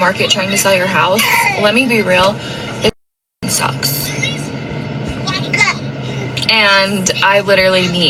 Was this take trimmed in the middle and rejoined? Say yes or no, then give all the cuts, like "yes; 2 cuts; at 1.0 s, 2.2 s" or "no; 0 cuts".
no; 0 cuts